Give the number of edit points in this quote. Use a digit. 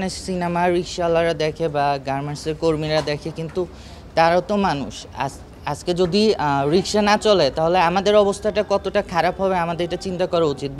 0